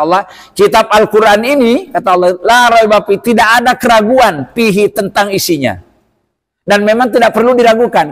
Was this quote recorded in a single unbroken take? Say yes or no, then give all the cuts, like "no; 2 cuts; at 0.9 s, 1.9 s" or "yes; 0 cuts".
yes; 0 cuts